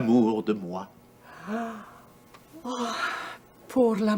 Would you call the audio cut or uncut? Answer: uncut